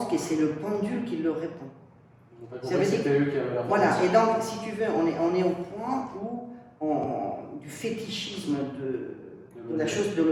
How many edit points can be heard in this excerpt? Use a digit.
0